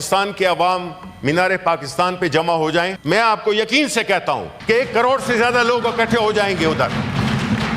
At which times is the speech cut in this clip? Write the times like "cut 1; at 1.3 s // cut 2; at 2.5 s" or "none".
cut 1; at 3.0 s // cut 2; at 4.5 s

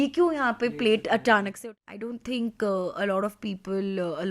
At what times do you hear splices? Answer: cut 1; at 1.5 s

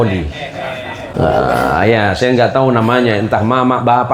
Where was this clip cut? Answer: cut 1; at 1.1 s

